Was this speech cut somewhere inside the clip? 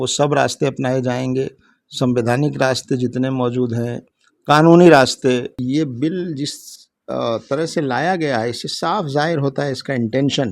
yes; 1 cut; at 5.5 s

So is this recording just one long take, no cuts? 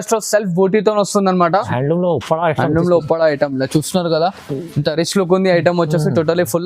no; 1 cut; at 1.7 s

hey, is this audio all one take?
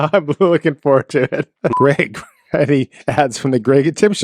no; 1 cut; at 1.7 s

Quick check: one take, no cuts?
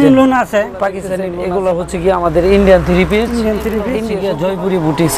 no; 2 cuts; at 1.1 s, 4.0 s

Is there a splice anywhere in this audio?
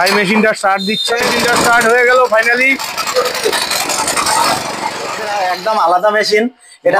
yes; 2 cuts; at 1.2 s, 5.3 s

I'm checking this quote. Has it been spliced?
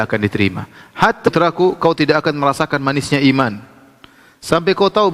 yes; 1 cut; at 1.3 s

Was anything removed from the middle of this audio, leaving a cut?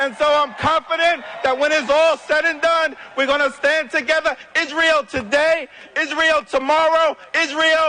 no; 0 cuts

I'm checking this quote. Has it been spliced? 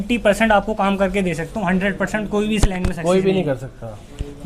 no; 0 cuts

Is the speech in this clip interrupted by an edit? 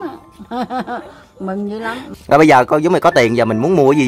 yes; 1 cut; at 2.1 s

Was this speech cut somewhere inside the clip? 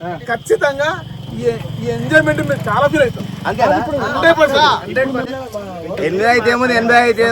yes; 1 cut; at 5.4 s

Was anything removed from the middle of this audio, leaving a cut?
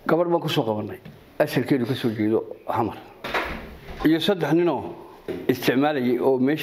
yes; 2 cuts; at 3.3 s, 5.3 s

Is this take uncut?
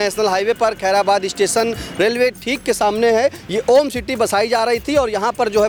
yes; 0 cuts

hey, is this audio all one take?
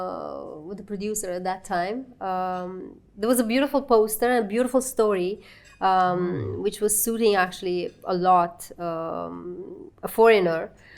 yes; 0 cuts

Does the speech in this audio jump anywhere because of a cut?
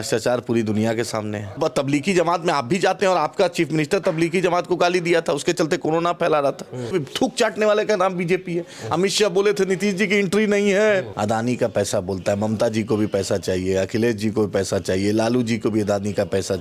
yes; 3 cuts; at 1.6 s, 6.9 s, 11.1 s

